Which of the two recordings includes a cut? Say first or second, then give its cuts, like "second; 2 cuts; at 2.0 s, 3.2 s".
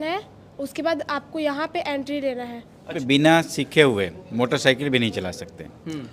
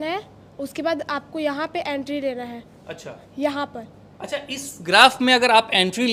first; 1 cut; at 3.0 s